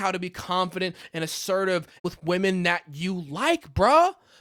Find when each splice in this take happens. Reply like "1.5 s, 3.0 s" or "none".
none